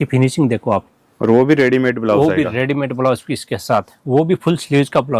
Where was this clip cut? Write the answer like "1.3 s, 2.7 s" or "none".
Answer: none